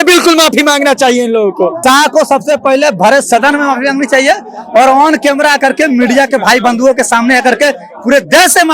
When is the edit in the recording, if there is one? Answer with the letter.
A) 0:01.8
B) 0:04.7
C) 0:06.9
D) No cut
A